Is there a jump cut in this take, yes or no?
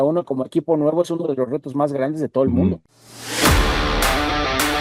yes